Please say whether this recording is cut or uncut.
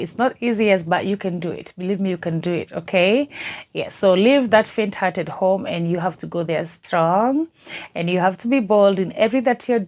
uncut